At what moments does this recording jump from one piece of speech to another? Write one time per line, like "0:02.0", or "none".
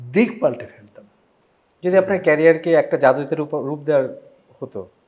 none